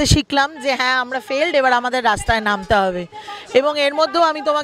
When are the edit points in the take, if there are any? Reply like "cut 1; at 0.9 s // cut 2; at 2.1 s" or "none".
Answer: none